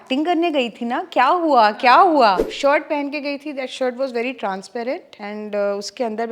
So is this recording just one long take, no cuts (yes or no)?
no